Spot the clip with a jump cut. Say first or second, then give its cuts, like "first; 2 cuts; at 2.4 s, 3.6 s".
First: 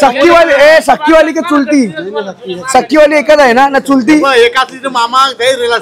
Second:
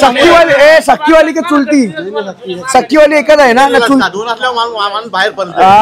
second; 1 cut; at 4.0 s